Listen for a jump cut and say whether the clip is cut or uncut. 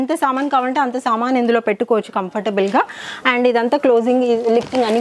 uncut